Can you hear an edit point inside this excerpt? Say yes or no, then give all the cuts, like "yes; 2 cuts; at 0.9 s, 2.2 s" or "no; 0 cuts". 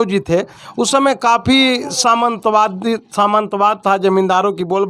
no; 0 cuts